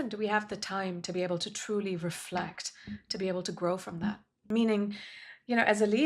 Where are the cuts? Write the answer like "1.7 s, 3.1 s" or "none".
4.3 s